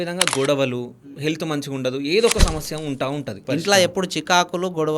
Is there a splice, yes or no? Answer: yes